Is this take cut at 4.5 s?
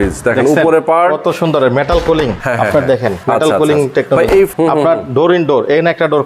yes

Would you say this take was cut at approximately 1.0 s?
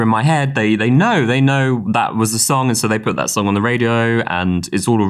no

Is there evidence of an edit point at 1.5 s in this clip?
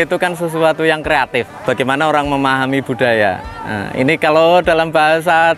yes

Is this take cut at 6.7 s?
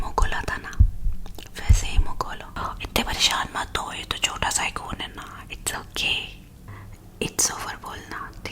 yes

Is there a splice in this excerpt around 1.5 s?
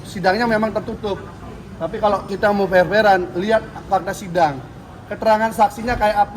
no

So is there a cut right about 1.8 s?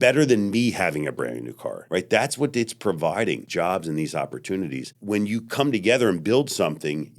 yes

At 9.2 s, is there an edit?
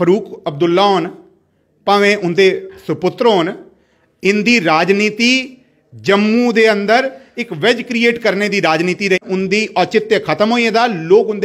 yes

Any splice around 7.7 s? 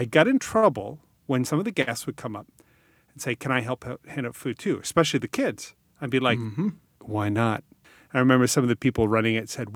yes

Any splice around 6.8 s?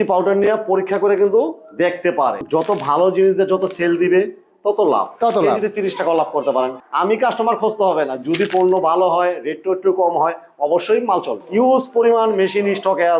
yes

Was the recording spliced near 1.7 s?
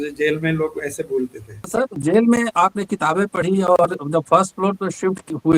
yes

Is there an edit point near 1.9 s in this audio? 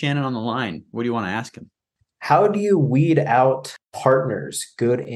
yes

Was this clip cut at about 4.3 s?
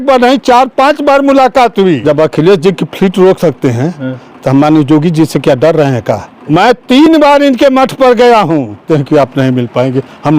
no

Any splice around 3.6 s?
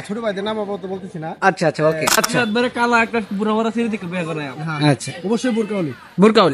no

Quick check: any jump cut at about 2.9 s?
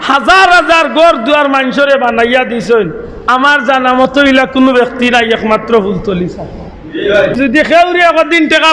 no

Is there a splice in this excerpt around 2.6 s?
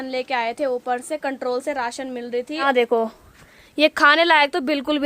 yes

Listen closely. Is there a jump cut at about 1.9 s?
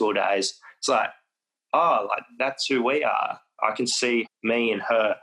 no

